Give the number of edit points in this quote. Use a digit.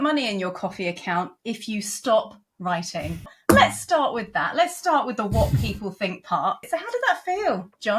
2